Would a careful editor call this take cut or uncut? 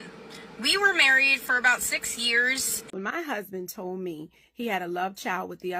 cut